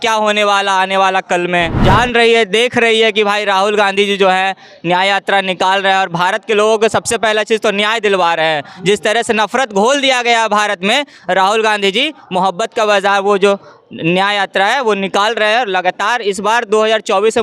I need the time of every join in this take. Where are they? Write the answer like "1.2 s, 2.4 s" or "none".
1.7 s